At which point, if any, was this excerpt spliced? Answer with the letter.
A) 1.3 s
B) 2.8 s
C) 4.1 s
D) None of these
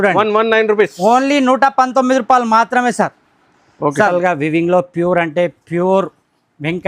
C